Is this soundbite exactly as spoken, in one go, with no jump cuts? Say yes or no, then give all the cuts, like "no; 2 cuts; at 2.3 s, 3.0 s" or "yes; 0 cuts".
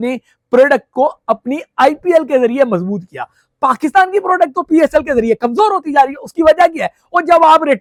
yes; 0 cuts